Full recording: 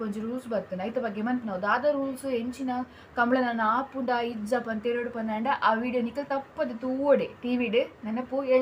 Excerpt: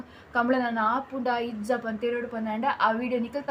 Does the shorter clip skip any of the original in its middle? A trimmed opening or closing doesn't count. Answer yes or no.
no